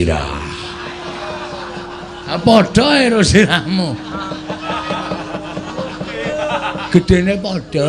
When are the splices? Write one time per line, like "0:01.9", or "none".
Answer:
none

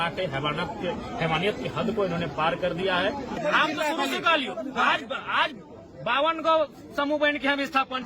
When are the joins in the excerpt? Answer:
0:03.4

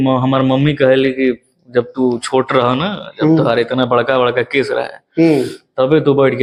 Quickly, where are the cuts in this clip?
none

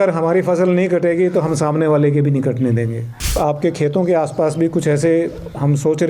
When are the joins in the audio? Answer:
0:03.4

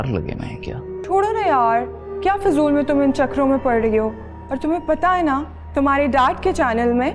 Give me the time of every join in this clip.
0:01.0

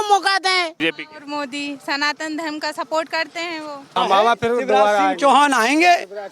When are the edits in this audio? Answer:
0:00.8
0:04.0

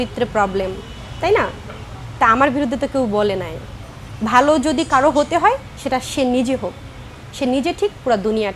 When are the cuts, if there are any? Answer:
none

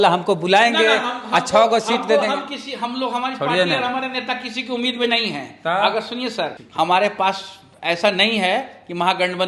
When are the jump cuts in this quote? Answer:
0:06.6

